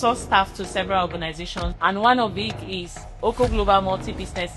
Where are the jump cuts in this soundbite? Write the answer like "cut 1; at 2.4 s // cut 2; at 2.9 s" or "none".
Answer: cut 1; at 1.6 s

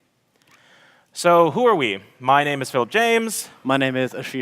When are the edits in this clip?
cut 1; at 3.1 s

